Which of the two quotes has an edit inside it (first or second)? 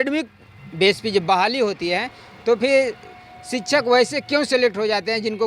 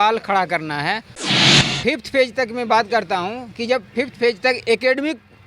second